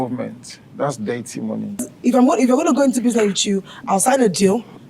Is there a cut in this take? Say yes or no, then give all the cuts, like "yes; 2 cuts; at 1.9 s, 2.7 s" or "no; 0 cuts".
yes; 1 cut; at 1.9 s